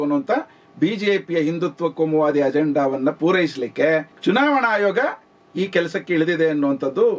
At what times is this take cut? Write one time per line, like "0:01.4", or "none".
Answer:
0:04.1